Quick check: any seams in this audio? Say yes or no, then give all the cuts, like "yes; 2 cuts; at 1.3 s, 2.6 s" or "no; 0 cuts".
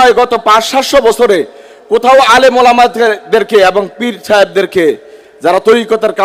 no; 0 cuts